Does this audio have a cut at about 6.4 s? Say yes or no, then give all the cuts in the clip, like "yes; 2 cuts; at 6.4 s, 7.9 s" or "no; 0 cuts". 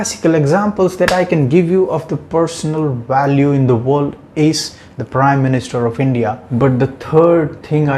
yes; 1 cut; at 6.4 s